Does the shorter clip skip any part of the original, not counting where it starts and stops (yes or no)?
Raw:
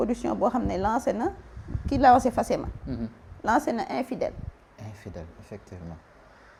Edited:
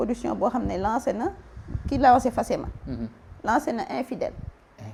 no